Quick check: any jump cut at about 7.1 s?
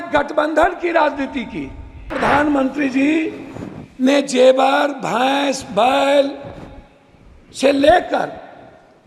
no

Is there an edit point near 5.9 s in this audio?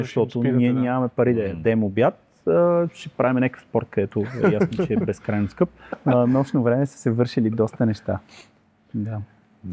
yes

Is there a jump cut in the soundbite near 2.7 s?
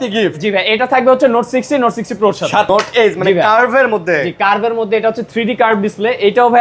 yes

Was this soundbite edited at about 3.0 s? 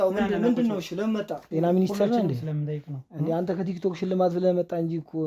no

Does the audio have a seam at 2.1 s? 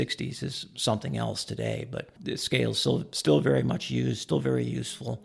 yes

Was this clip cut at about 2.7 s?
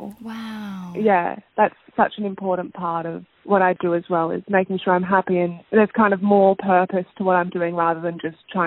no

